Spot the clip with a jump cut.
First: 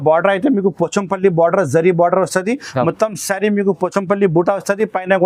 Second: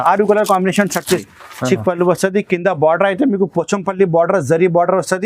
second; 1 cut; at 1.2 s

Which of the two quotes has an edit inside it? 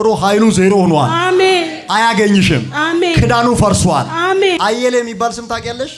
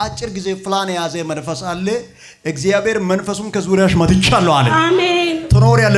first; 1 cut; at 4.6 s

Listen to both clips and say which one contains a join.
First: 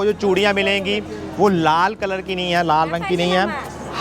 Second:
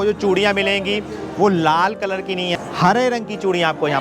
second; 1 cut; at 2.5 s

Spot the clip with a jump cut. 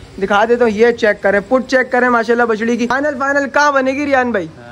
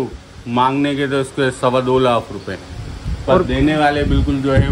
first; 1 cut; at 2.9 s

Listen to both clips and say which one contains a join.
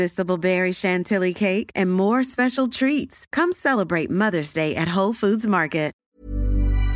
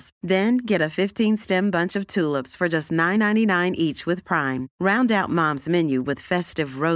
first; 1 cut; at 6.0 s

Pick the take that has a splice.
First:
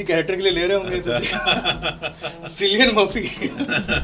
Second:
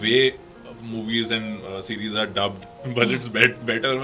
second; 1 cut; at 2.7 s

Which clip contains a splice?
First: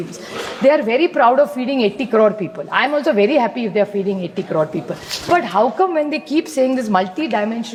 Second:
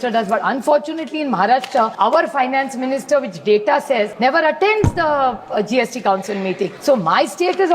second; 3 cuts; at 1.9 s, 4.1 s, 6.8 s

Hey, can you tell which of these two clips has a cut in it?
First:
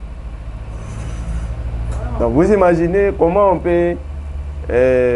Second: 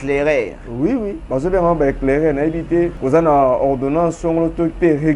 second; 2 cuts; at 1.2 s, 3.0 s

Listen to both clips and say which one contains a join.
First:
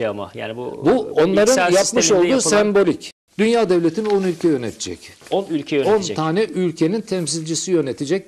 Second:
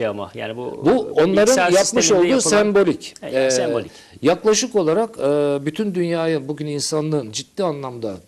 first; 1 cut; at 3.1 s

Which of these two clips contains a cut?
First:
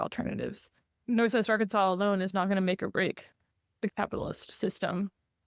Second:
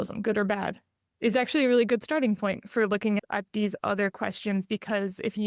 first; 2 cuts; at 1.1 s, 3.9 s

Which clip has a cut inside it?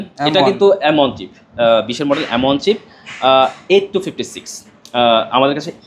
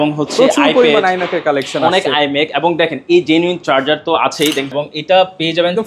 second; 1 cut; at 4.7 s

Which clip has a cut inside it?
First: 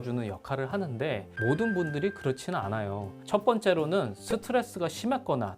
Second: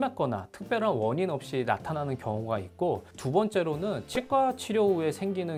first; 2 cuts; at 1.3 s, 3.1 s

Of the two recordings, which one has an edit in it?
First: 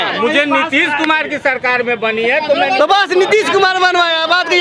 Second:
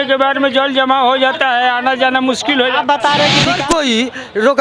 second; 1 cut; at 3.5 s

